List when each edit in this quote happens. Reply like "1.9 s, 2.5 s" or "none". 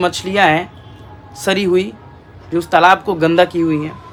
none